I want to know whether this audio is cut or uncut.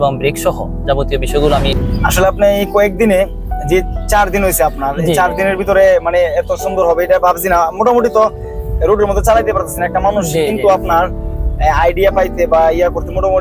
cut